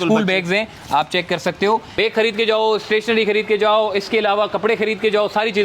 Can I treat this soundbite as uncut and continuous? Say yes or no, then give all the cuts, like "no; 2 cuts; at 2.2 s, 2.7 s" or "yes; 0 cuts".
no; 1 cut; at 1.9 s